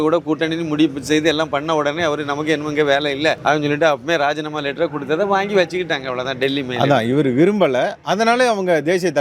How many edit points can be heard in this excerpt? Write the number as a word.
one